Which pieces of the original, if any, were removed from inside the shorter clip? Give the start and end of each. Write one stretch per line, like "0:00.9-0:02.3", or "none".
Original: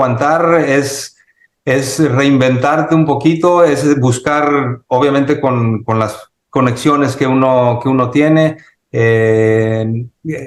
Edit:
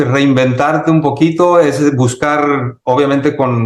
none